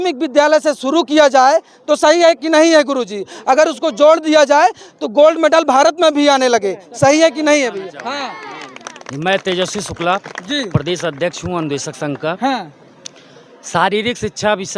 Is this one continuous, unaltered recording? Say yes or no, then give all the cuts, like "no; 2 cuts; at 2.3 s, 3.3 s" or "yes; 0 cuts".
yes; 0 cuts